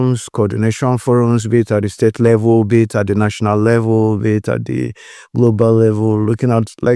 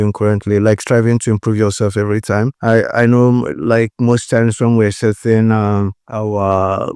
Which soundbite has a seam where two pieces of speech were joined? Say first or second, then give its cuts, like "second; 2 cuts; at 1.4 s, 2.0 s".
second; 2 cuts; at 2.5 s, 6.0 s